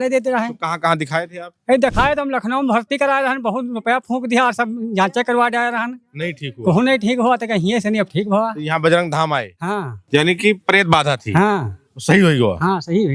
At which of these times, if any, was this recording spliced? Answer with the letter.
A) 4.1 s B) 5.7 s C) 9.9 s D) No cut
C